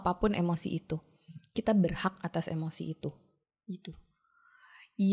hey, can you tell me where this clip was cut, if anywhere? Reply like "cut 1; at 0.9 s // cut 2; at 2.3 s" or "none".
none